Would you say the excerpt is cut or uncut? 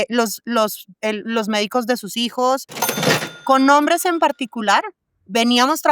cut